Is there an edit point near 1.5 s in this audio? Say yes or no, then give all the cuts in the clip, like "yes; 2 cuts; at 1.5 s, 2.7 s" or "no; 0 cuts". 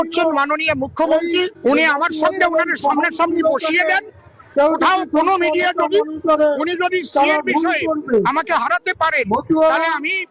yes; 1 cut; at 1.5 s